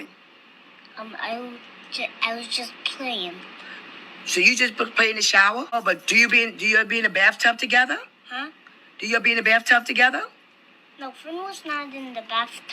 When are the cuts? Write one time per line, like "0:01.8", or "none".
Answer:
0:05.7